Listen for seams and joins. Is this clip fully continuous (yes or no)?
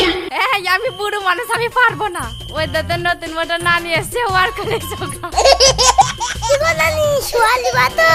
yes